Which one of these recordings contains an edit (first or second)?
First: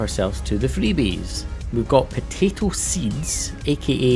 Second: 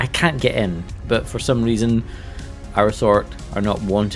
second